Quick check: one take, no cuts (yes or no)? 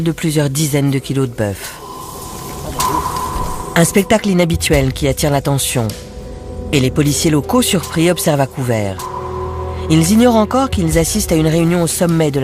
yes